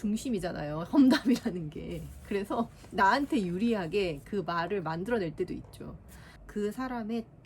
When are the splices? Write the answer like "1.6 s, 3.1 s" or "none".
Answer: 6.4 s